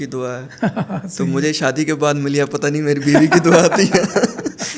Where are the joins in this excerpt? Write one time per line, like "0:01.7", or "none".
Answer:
none